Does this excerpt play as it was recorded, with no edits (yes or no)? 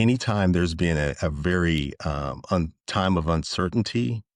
yes